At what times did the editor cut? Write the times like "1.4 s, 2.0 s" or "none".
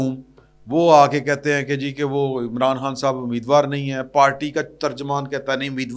none